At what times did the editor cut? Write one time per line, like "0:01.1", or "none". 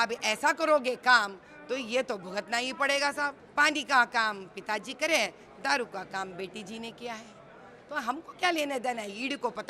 0:03.4